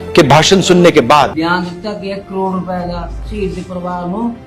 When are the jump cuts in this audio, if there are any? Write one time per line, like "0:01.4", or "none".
0:01.3